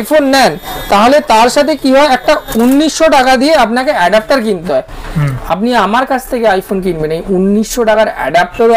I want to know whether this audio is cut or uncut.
uncut